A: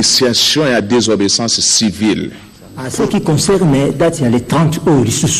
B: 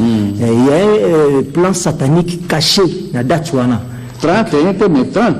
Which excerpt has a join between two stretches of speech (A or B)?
A